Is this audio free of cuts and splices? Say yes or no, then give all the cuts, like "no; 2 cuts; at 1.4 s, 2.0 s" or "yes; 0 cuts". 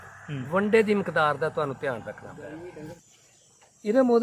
no; 1 cut; at 3.0 s